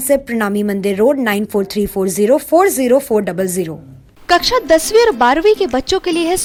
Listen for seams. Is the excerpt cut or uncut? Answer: uncut